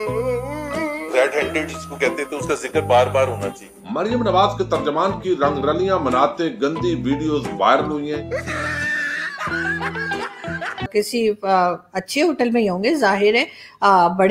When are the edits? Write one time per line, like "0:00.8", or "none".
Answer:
0:10.9